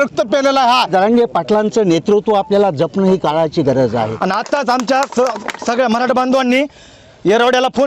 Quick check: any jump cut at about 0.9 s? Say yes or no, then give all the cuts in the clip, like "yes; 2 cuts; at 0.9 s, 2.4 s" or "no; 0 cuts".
yes; 2 cuts; at 0.9 s, 4.1 s